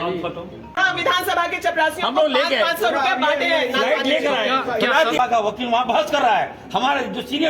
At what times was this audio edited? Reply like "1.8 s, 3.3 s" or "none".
0.8 s, 5.2 s